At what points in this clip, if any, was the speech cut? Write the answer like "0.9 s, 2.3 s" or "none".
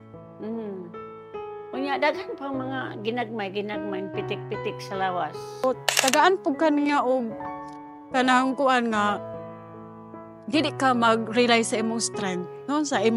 5.6 s

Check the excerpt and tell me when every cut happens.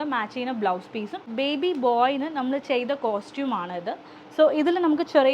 1.3 s

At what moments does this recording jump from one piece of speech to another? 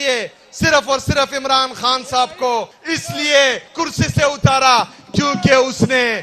2.8 s, 3.6 s

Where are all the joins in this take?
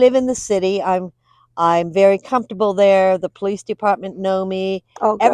none

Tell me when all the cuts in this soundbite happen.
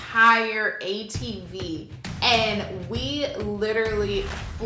none

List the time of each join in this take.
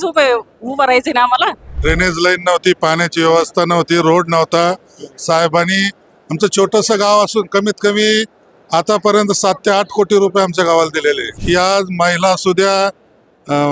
1.7 s, 11.3 s

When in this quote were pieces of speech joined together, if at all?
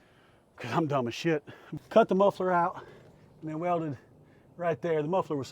1.6 s

